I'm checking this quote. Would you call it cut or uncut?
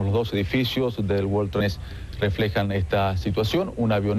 uncut